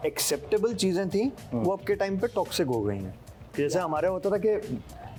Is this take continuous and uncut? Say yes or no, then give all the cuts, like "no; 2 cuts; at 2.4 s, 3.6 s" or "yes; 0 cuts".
yes; 0 cuts